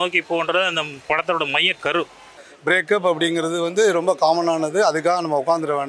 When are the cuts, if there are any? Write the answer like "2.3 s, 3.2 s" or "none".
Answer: 2.4 s